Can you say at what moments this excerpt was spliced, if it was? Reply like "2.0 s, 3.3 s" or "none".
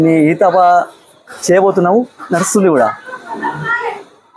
none